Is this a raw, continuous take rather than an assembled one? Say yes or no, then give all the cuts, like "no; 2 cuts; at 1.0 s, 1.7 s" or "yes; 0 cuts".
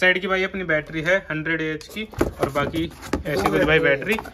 yes; 0 cuts